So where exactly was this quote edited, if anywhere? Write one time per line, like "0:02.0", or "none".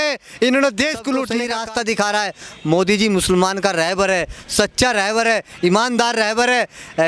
0:01.5